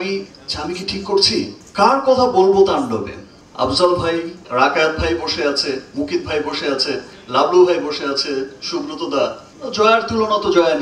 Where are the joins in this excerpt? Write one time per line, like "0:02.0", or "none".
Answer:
0:01.6
0:04.4
0:09.5